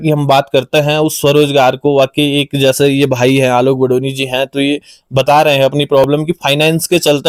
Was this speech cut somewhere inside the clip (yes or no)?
no